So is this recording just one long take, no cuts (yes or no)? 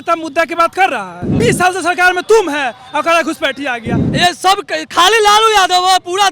no